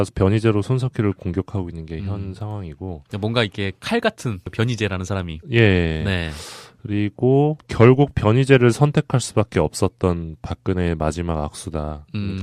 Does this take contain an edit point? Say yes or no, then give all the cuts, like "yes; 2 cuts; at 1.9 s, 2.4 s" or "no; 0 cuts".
no; 0 cuts